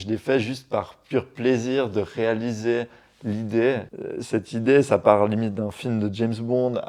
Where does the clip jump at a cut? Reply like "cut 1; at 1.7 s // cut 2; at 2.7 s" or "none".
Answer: cut 1; at 3.9 s